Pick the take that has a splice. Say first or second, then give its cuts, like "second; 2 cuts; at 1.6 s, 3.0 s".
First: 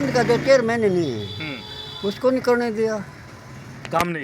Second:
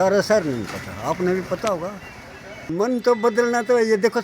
second; 1 cut; at 2.7 s